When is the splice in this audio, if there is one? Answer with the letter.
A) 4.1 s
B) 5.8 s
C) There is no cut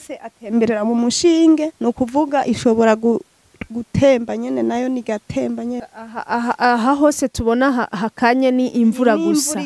B